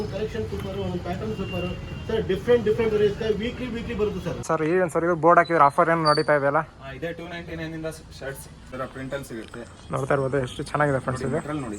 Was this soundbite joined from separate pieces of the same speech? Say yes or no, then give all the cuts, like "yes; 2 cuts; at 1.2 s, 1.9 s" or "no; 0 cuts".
yes; 2 cuts; at 4.4 s, 8.6 s